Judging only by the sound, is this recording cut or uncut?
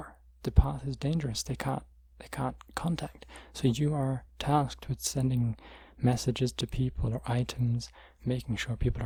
uncut